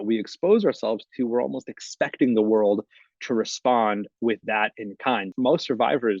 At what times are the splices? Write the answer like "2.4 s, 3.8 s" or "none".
5.3 s